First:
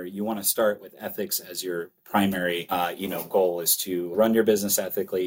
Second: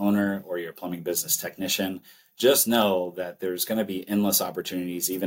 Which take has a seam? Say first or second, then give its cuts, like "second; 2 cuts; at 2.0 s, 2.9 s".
first; 3 cuts; at 2.0 s, 2.6 s, 4.1 s